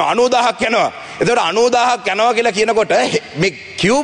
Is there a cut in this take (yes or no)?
no